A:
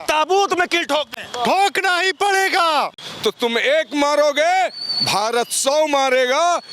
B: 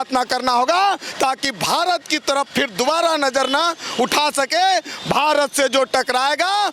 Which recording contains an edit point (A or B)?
A